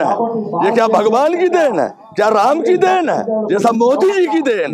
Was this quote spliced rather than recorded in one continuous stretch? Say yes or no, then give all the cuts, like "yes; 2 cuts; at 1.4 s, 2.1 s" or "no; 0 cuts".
no; 0 cuts